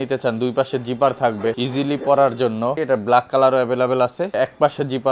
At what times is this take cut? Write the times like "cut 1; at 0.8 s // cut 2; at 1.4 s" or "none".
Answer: cut 1; at 1.6 s // cut 2; at 2.7 s // cut 3; at 4.3 s